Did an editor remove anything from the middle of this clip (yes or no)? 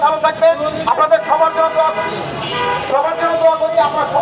no